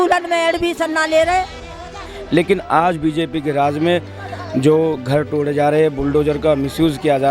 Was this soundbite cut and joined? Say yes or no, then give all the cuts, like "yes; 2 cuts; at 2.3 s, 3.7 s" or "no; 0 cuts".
yes; 1 cut; at 2.1 s